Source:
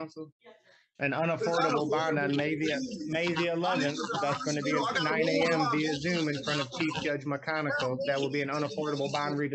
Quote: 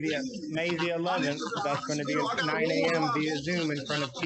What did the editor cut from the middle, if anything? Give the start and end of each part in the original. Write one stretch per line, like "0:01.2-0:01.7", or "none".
none